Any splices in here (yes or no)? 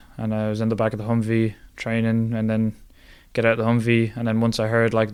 no